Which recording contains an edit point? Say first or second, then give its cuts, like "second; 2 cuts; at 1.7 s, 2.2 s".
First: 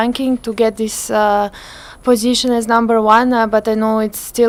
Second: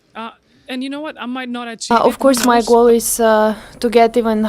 second; 1 cut; at 1.9 s